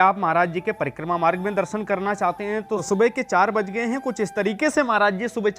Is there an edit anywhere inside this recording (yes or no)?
yes